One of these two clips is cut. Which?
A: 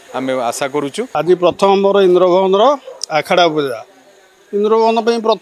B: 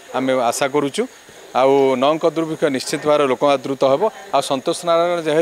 A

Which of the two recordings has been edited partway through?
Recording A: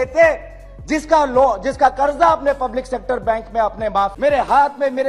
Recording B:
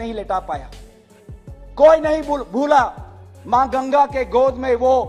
A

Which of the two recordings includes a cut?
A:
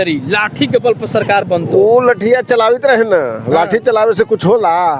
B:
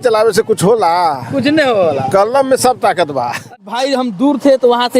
B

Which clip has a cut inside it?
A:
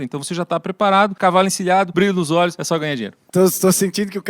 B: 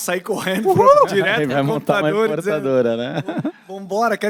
A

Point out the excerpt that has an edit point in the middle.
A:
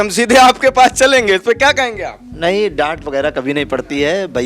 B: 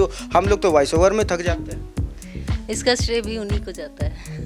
A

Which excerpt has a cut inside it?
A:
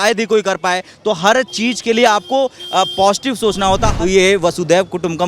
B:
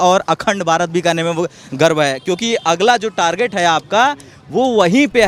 A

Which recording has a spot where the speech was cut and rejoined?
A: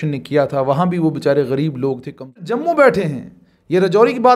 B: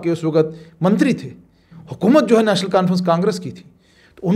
A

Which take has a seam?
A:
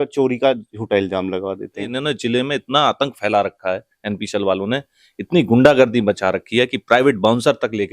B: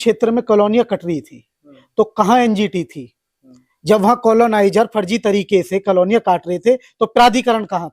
A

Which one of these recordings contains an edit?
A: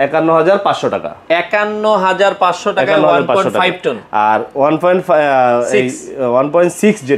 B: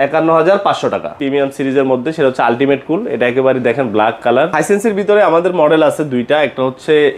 B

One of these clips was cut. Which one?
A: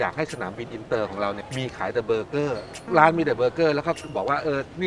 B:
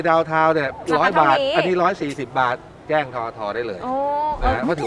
A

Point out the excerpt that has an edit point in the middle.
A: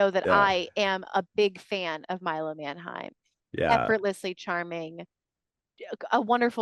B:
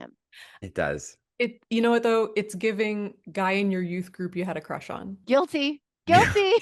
B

